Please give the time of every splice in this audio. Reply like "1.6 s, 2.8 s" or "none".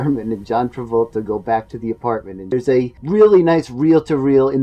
2.7 s